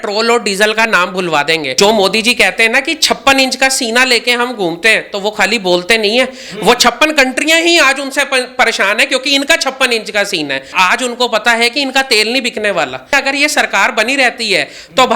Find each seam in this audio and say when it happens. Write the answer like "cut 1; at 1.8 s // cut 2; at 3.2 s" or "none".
cut 1; at 1.7 s // cut 2; at 10.7 s // cut 3; at 13.1 s